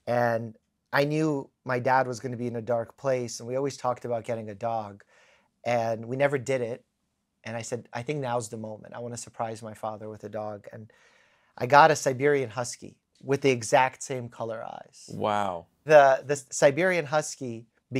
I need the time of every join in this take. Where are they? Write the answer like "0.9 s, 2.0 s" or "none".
none